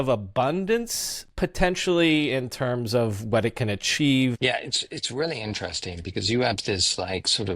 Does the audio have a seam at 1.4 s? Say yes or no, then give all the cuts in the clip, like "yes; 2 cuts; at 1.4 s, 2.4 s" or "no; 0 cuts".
no; 1 cut; at 4.4 s